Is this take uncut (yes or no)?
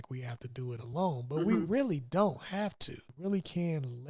no